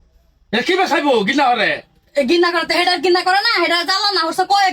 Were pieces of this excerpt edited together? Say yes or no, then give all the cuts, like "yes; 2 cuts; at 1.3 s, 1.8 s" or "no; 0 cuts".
no; 0 cuts